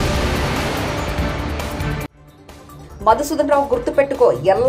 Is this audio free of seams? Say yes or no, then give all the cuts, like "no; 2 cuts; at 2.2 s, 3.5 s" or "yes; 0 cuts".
no; 1 cut; at 2.3 s